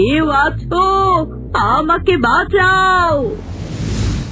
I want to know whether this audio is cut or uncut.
cut